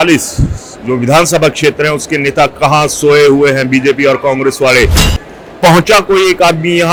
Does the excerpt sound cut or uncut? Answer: uncut